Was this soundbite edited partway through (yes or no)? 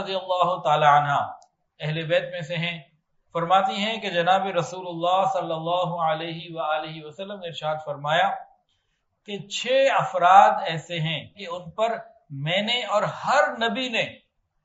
yes